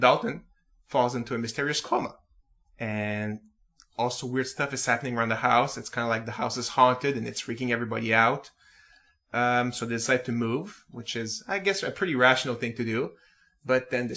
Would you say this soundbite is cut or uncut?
cut